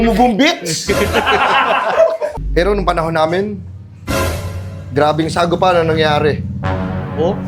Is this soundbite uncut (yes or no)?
no